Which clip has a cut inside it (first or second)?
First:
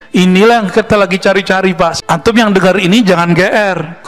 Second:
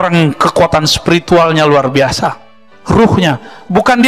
first